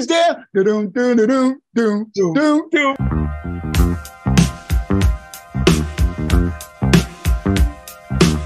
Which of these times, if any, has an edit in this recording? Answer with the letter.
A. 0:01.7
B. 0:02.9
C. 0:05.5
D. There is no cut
B